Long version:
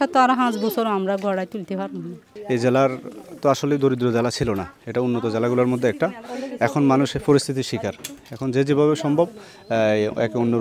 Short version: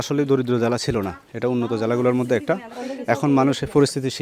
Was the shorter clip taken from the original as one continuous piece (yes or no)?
yes